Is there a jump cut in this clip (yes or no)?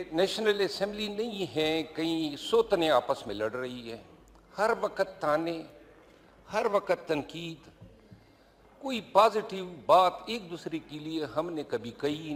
no